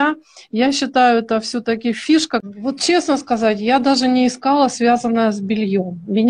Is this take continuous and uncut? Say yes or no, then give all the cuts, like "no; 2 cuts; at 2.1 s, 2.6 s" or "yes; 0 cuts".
no; 1 cut; at 2.4 s